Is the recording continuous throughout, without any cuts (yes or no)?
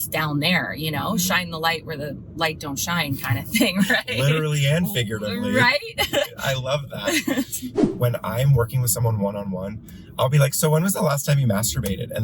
no